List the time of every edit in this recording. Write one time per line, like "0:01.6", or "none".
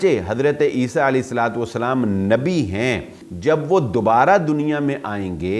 0:03.2